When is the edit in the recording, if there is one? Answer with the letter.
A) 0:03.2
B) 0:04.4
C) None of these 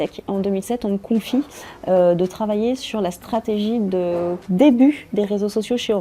B